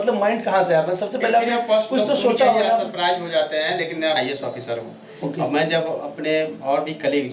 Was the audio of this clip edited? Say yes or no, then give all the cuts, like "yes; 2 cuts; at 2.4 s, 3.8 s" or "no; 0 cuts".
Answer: yes; 1 cut; at 4.2 s